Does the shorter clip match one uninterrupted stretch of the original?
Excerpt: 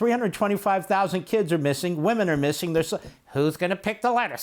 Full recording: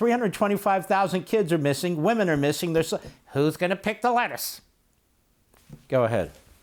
yes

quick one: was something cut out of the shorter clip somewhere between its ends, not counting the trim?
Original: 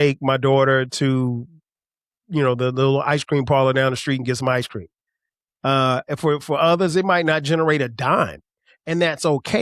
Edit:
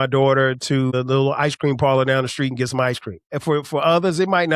yes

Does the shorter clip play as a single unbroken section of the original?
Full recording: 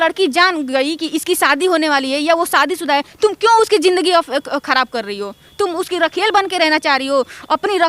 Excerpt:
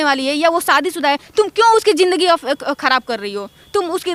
yes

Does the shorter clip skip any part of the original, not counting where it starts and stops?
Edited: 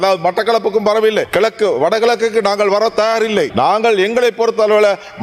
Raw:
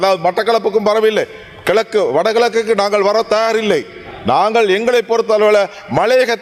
yes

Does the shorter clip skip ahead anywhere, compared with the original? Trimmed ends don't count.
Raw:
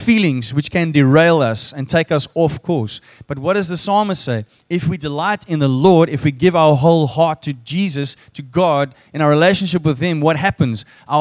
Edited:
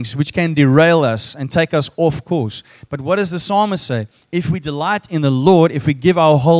no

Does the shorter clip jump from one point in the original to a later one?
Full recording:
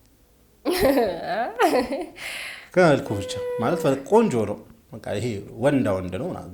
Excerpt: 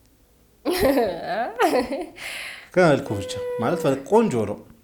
no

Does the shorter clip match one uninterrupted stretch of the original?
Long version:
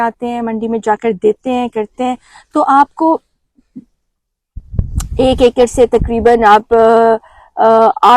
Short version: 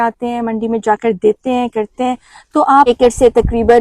no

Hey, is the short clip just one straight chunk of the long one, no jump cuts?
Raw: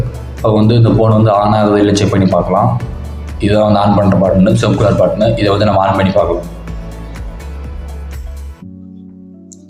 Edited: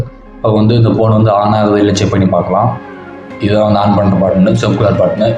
yes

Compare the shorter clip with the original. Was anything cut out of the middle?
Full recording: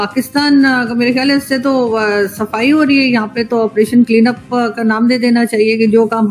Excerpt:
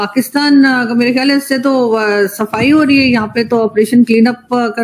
no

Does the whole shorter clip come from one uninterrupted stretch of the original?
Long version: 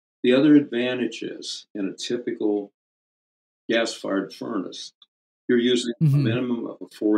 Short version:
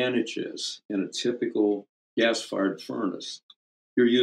no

